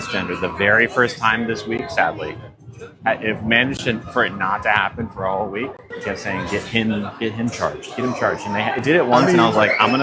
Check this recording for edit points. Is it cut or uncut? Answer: uncut